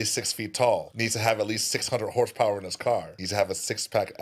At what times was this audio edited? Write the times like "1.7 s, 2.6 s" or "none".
0.9 s, 3.2 s